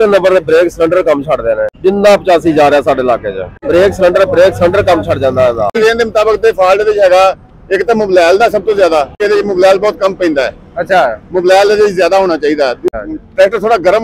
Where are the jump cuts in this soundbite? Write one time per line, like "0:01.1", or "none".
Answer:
0:01.8
0:03.6
0:05.8
0:09.2
0:12.8